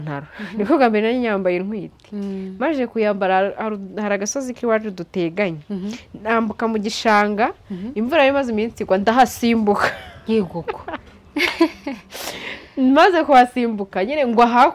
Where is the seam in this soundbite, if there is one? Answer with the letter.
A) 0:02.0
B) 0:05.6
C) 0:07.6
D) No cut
D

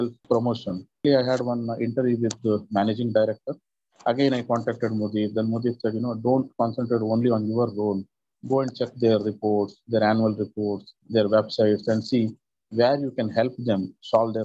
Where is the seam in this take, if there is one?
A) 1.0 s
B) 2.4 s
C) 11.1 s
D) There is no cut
A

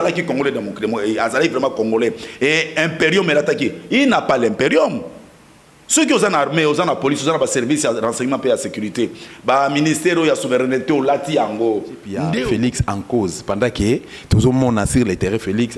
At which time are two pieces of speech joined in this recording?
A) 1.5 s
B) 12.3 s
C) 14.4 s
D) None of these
B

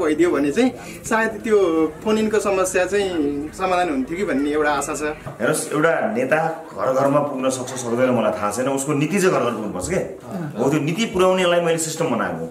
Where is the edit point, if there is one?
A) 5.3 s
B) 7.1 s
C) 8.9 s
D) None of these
A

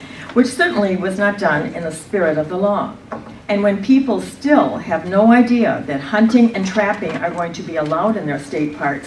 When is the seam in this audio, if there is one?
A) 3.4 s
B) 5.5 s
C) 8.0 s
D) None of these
D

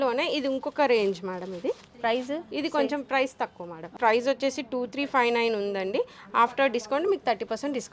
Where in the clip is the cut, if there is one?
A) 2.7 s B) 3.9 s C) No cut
B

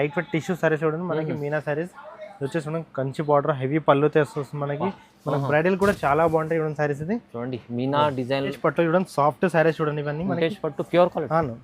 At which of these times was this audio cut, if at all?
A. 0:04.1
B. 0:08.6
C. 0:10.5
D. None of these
B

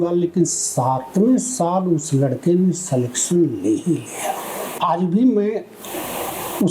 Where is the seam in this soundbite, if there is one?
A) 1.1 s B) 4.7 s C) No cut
B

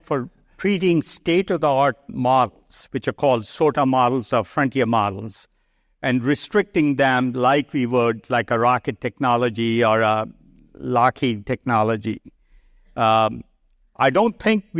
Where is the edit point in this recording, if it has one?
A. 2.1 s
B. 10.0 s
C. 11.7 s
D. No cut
A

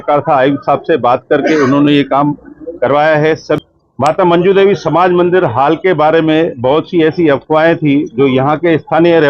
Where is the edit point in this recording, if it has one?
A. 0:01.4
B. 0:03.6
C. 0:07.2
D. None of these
B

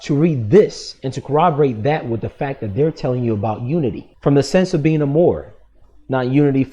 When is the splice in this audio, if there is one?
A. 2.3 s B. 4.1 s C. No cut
B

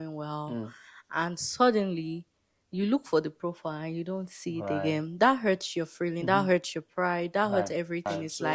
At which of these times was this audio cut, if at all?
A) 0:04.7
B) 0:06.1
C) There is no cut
C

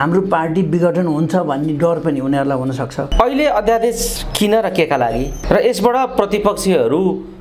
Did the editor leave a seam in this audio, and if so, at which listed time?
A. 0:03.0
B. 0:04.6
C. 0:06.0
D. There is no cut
A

